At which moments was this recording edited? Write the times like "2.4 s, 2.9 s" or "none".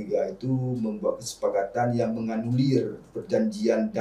none